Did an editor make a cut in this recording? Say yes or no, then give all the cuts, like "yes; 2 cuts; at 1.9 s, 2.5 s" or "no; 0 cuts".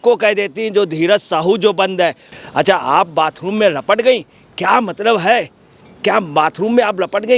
yes; 1 cut; at 2.3 s